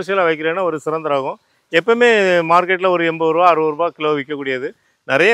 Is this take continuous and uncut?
yes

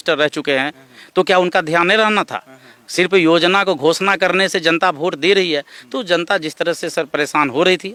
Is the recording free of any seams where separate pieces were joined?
yes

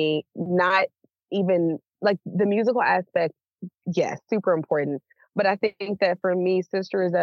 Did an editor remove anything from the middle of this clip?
no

